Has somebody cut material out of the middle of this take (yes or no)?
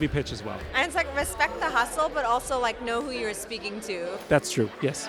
no